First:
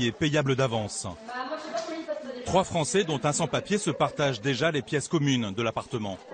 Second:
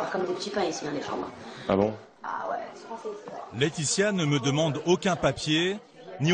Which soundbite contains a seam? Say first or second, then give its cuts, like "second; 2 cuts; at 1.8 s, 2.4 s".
second; 1 cut; at 2.7 s